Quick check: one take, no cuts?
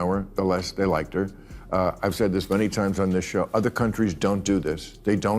no; 1 cut; at 1.5 s

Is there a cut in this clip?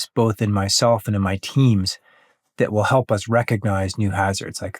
no; 0 cuts

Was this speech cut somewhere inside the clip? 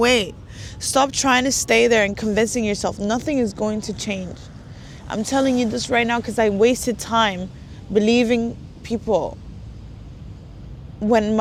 no; 0 cuts

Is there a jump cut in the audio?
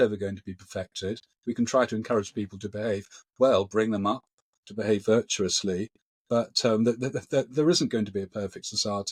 no; 0 cuts

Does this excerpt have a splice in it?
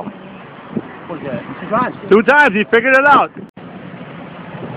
yes; 1 cut; at 3.4 s

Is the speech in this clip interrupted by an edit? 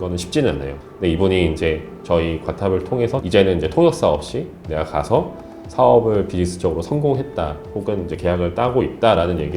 yes; 1 cut; at 3.2 s

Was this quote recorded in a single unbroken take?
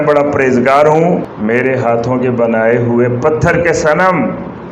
no; 1 cut; at 1.3 s

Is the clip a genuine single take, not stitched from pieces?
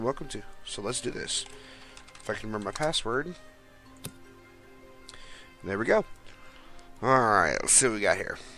no; 1 cut; at 3.5 s

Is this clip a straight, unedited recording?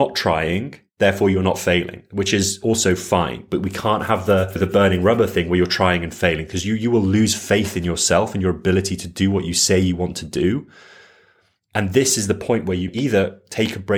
no; 1 cut; at 12.9 s

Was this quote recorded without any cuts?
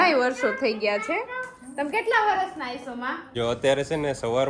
no; 1 cut; at 3.2 s

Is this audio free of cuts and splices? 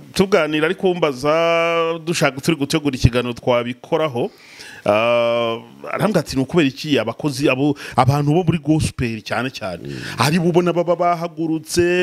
yes; 0 cuts

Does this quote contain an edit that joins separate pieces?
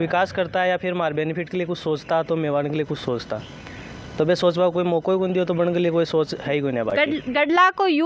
no; 0 cuts

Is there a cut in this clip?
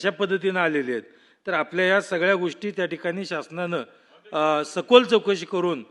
no; 0 cuts

